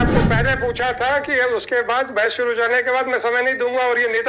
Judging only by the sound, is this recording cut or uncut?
uncut